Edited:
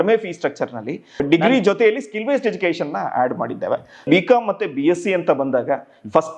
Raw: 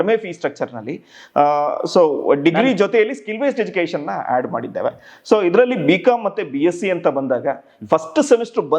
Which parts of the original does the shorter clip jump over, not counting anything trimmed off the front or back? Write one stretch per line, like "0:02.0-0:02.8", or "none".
0:01.2-0:02.4
0:05.2-0:05.8